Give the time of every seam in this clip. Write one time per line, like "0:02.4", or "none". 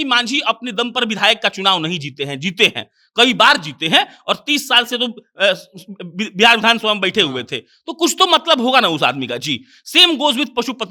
none